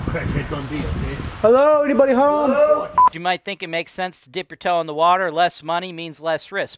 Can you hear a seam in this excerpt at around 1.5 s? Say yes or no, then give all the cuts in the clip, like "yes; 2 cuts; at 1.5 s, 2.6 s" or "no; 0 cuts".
no; 1 cut; at 3.1 s